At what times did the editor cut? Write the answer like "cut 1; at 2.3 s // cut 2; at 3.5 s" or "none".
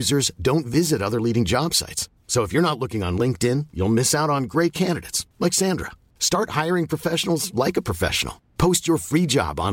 none